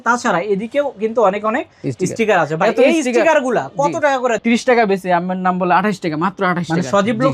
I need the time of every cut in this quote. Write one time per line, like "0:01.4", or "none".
0:04.4